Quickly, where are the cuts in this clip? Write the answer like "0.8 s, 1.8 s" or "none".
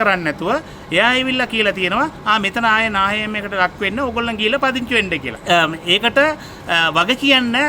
5.3 s